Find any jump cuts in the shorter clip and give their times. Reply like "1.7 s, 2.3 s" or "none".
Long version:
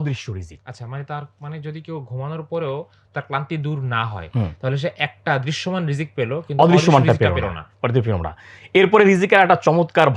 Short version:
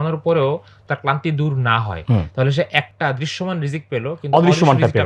none

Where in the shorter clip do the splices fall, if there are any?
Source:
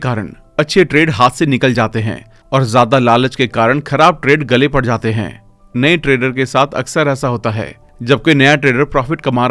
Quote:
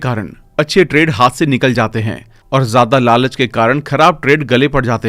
none

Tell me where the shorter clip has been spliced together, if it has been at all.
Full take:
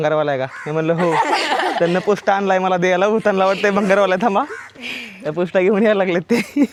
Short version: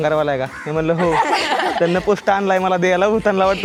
none

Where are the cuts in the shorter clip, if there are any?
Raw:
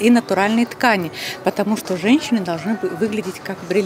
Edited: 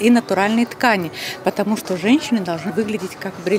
2.7 s

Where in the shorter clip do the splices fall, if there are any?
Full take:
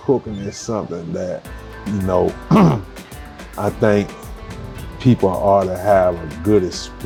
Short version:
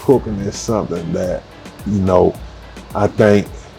2.4 s

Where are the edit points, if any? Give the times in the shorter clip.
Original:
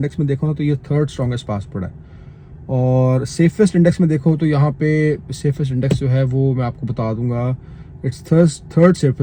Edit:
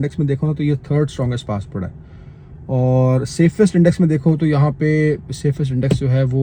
none

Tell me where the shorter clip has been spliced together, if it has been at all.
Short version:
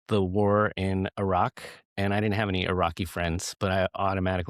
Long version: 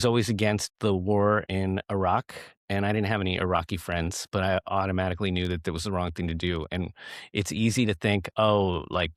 none

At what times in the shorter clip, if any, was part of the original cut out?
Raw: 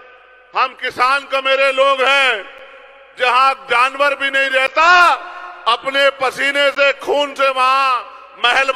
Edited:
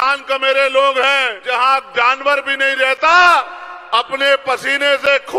1.4 s

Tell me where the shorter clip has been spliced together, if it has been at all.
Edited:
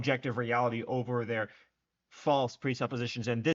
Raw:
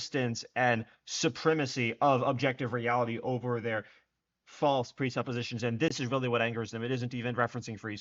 none

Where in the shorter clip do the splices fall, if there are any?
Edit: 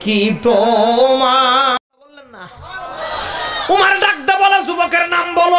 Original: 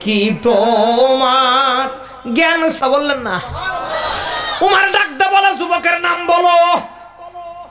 2.2 s

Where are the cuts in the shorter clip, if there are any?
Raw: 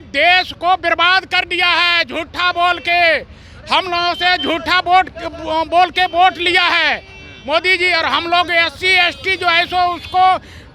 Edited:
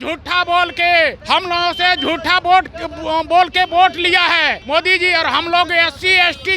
1.2 s, 4.6 s

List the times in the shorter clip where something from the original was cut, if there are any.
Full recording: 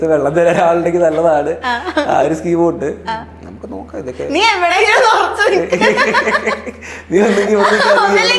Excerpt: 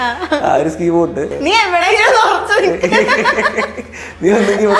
1.3 s

